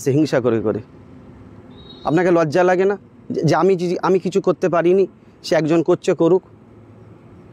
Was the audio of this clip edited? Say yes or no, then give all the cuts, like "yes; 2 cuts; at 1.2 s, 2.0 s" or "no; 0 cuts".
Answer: no; 0 cuts